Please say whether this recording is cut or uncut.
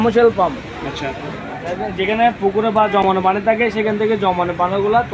uncut